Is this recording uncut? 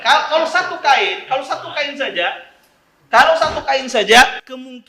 yes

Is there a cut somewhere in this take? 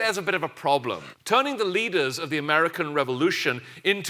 yes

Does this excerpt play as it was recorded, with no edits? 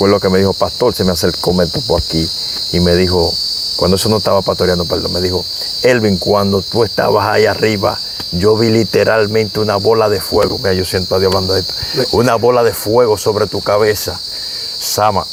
yes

